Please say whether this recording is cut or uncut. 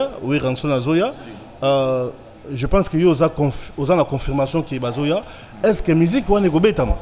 uncut